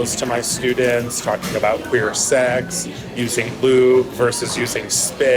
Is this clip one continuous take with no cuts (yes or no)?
yes